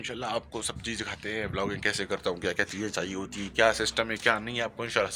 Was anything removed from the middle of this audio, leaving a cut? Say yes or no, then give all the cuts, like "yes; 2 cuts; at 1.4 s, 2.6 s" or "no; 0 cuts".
no; 0 cuts